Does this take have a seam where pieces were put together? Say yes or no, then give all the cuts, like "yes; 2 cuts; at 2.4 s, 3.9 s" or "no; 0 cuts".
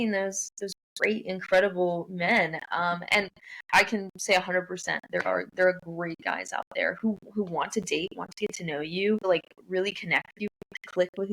yes; 1 cut; at 9.2 s